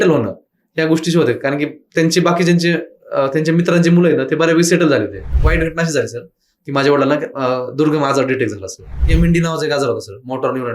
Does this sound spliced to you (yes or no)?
yes